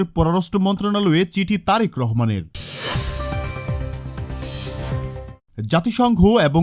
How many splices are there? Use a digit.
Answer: 2